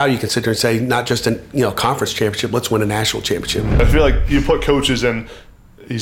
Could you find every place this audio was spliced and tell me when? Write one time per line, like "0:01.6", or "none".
0:03.8

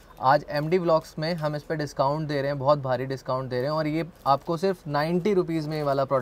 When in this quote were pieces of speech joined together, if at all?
none

